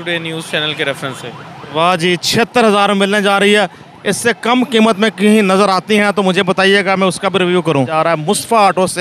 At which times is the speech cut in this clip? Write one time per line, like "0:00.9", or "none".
0:07.9

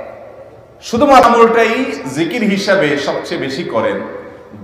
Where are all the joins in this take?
0:01.2

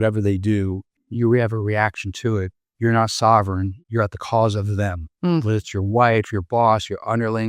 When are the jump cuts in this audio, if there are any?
0:00.9
0:02.6
0:03.7

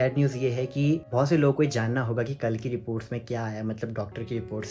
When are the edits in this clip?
0:01.1

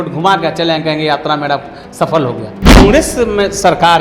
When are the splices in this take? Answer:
0:02.8

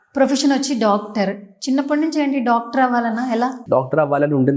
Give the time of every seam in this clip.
0:03.6

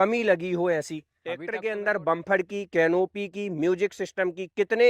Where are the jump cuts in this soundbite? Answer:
0:01.5

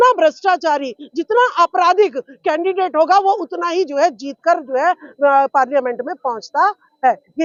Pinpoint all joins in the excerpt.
none

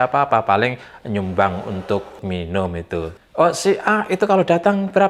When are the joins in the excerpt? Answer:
0:02.1
0:03.1

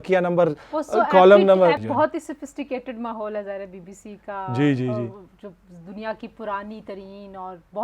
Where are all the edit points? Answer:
0:01.8

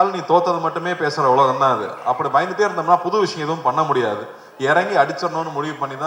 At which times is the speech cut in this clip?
none

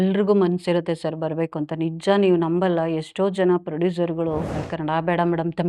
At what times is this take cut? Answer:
0:04.7

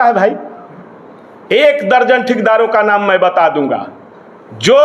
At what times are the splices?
none

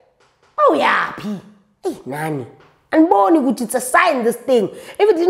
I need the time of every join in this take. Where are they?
none

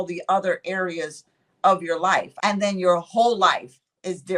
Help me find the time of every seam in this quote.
0:02.3

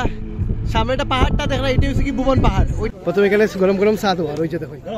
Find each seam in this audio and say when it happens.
0:02.8

